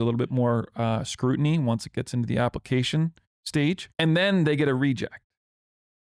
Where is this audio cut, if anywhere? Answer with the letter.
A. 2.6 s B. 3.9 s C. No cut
B